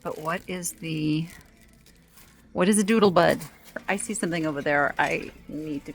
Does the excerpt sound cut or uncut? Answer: cut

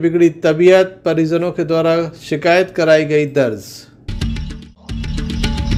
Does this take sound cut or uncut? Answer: cut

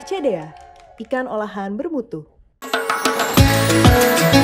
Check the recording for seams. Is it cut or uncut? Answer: uncut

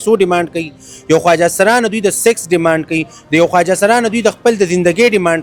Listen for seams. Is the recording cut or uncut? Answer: uncut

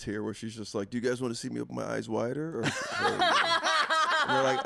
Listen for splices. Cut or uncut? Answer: uncut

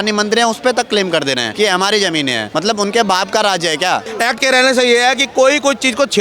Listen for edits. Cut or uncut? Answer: cut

